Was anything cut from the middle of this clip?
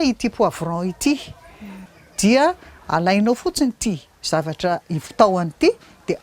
yes; 1 cut; at 1.8 s

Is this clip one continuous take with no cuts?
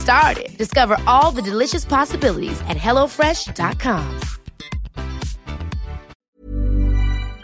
no; 1 cut; at 6.2 s

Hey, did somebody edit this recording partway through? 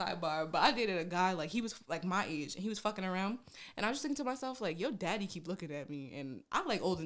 no; 0 cuts

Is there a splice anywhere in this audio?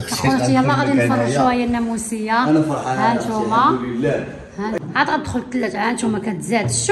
yes; 1 cut; at 4.8 s

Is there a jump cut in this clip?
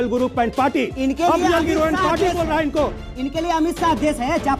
no; 0 cuts

